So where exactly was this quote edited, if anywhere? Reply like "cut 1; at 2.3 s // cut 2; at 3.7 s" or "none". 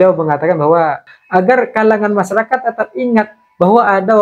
cut 1; at 1.0 s